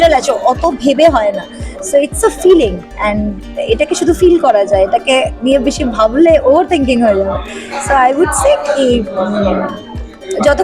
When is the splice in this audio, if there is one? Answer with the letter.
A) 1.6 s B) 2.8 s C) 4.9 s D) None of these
A